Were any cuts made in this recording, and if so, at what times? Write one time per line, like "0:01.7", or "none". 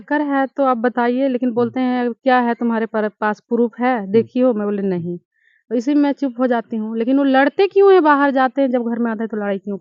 none